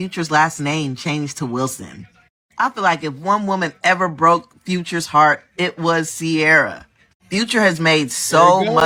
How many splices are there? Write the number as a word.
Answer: zero